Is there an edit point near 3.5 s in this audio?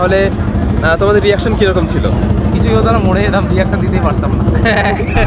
no; 1 cut; at 2.2 s

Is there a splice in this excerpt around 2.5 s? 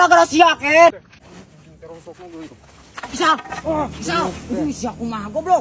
no; 1 cut; at 1.1 s

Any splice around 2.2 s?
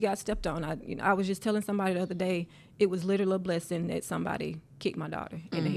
no; 0 cuts

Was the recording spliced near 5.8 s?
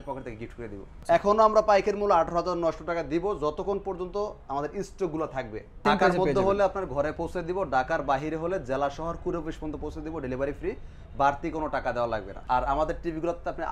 yes; 3 cuts; at 0.9 s, 5.8 s, 12.3 s

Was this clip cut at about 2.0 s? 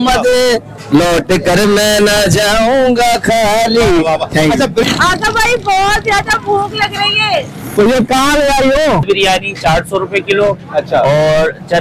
no; 2 cuts; at 4.8 s, 9.0 s

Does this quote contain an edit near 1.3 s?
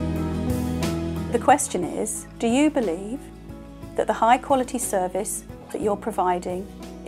yes; 1 cut; at 1.3 s

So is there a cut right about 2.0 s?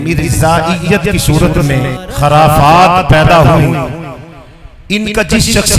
yes; 1 cut; at 2.0 s

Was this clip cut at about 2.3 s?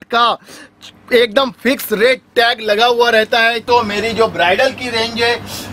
no; 1 cut; at 3.6 s

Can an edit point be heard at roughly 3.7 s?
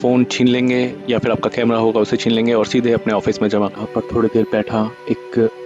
yes; 1 cut; at 3.7 s

